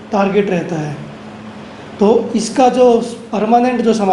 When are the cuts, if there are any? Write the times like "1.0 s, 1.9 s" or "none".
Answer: none